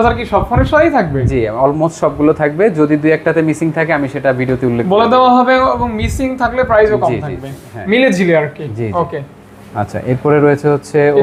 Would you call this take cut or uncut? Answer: uncut